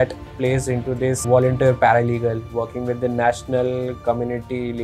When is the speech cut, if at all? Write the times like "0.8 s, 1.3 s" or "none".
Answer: 1.2 s